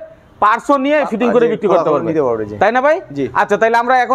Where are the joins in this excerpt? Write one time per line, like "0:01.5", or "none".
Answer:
none